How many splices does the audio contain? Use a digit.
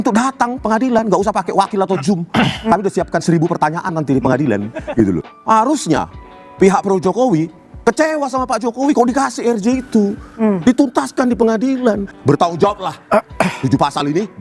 2